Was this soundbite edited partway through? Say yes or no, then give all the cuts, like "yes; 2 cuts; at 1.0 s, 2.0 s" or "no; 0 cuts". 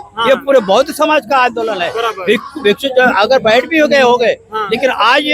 no; 0 cuts